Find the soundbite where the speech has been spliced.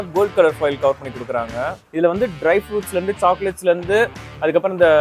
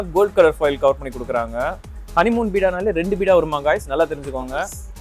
first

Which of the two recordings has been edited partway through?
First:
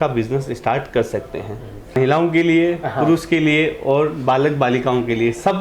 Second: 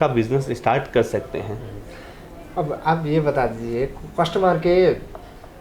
first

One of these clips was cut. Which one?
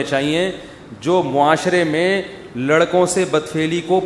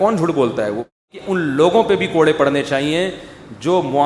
second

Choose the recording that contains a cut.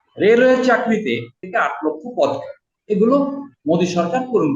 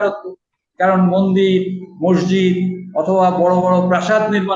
first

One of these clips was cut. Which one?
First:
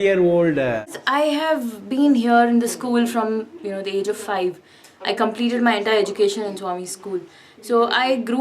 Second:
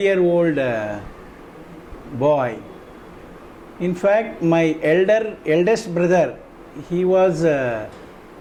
first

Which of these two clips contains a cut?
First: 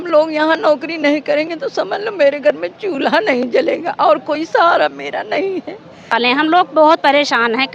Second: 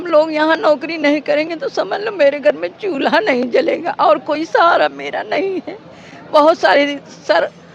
first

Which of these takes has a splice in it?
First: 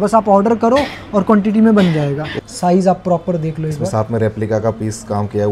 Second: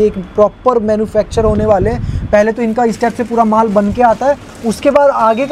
first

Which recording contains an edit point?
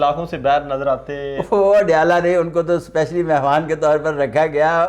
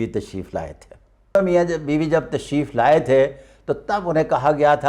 second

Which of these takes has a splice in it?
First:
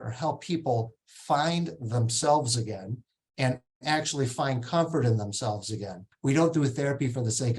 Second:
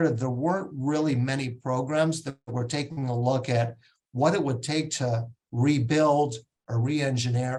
first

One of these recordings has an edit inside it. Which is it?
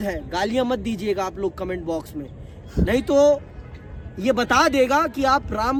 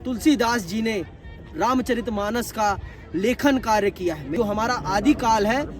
second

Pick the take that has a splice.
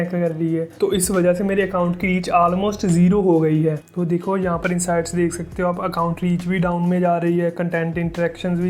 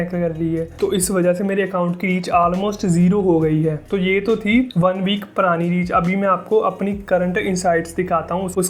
first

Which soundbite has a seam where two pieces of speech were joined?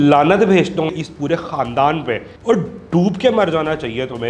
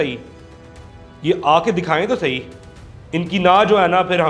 first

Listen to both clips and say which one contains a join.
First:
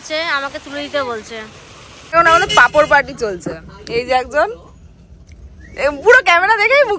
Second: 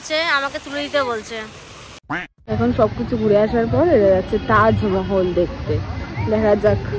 first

